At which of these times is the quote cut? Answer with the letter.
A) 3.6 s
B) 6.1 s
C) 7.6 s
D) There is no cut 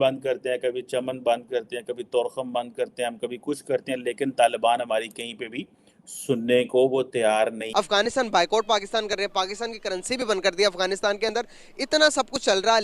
C